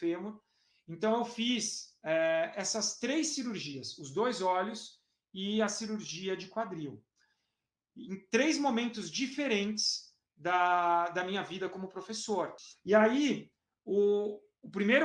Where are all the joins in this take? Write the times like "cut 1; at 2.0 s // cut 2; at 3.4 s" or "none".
cut 1; at 12.6 s